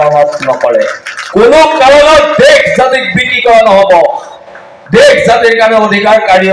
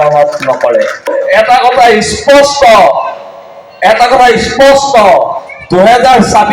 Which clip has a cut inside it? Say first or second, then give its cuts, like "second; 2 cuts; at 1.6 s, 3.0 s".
second; 1 cut; at 1.1 s